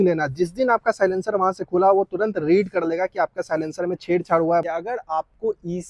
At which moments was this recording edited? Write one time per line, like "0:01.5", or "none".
0:04.6

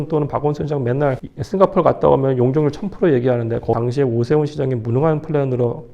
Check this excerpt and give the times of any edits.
0:01.3
0:03.8

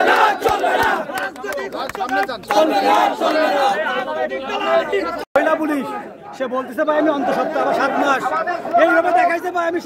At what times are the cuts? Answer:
none

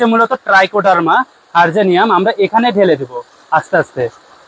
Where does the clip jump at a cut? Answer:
none

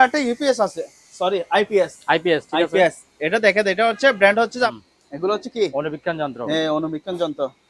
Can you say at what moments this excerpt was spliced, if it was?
0:04.7

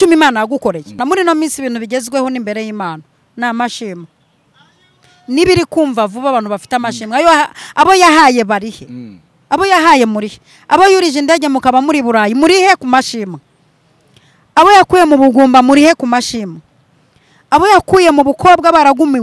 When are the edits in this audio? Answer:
0:01.0

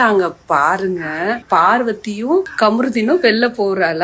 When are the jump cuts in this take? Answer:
0:01.4
0:02.5

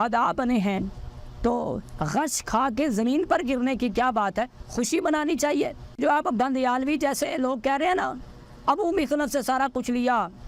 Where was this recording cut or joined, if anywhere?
0:06.0

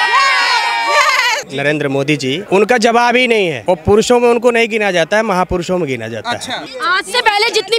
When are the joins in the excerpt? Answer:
0:01.5
0:02.4
0:03.6
0:06.7

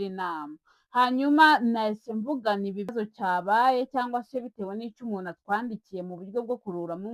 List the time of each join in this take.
0:02.9

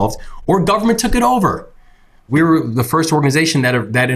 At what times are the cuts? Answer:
0:02.3

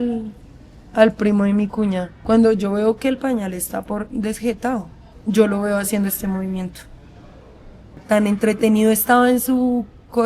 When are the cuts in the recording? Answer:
0:02.2
0:05.1
0:08.0

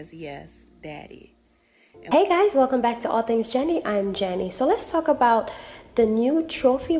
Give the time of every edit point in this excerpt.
0:02.1

